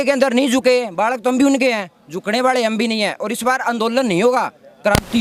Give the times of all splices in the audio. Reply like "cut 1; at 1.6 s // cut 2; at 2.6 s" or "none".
none